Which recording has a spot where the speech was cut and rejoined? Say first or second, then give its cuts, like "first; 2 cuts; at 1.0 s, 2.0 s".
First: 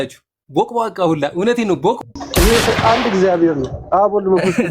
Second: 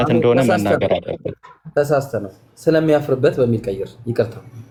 first; 1 cut; at 2.2 s